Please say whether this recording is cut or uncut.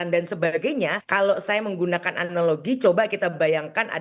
cut